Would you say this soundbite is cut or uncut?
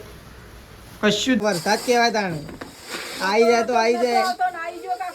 cut